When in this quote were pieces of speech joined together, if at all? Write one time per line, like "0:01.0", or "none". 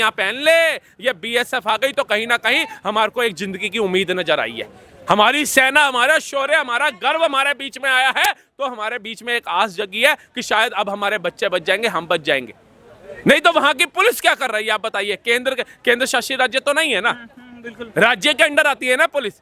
none